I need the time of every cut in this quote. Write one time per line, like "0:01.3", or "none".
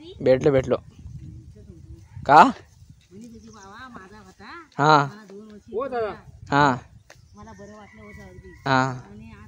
none